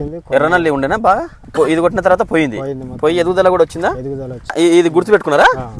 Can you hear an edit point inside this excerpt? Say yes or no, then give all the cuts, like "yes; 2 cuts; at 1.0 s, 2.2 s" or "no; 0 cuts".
yes; 2 cuts; at 1.4 s, 4.5 s